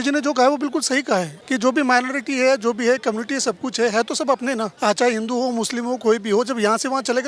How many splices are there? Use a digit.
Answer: 2